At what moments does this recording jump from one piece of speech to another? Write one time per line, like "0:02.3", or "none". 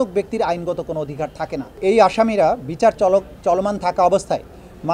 0:01.8